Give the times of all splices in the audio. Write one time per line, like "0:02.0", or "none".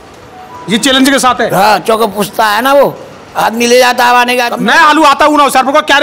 0:04.5